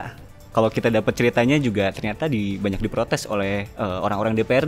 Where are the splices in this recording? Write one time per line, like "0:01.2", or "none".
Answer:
none